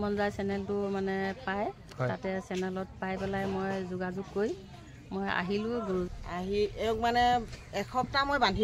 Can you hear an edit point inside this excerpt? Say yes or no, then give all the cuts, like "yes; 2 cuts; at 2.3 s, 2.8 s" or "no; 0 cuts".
yes; 1 cut; at 6.1 s